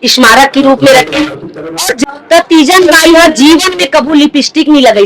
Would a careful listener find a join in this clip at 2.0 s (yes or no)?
yes